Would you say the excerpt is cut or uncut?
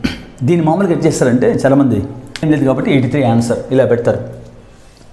cut